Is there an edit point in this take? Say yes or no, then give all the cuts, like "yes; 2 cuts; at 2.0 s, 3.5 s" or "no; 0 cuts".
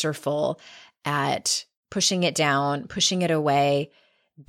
no; 0 cuts